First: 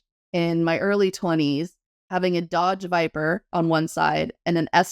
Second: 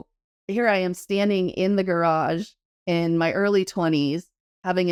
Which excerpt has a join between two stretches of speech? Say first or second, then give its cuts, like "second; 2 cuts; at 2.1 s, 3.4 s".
first; 1 cut; at 3.4 s